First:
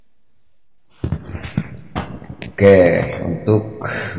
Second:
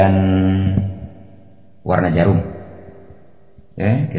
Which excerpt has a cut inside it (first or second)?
first